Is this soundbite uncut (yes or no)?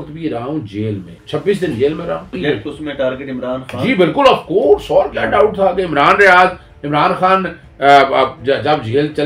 no